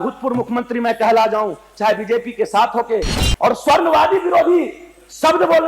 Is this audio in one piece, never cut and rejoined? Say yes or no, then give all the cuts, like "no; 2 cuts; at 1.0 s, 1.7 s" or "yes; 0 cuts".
no; 1 cut; at 3.2 s